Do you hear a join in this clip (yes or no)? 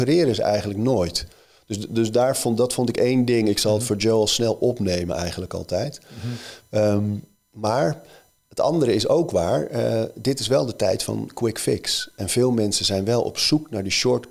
no